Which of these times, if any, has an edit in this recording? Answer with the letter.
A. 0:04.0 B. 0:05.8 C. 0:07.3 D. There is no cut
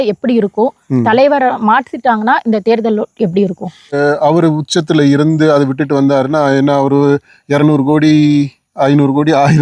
A